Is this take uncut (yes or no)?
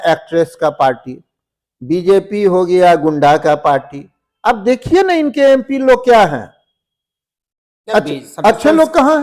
yes